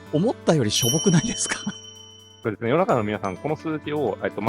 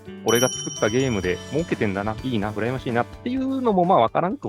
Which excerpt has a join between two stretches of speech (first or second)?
first